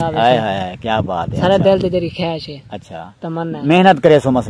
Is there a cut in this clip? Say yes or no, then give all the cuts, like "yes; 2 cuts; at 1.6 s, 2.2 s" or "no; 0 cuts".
no; 0 cuts